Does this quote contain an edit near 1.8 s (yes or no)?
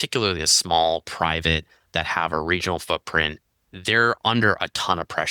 no